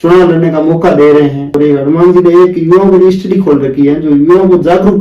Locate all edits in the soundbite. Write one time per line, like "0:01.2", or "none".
0:01.6